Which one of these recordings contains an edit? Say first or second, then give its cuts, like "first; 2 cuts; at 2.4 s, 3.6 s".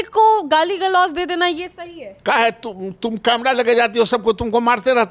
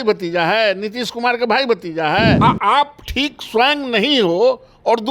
second; 1 cut; at 2.4 s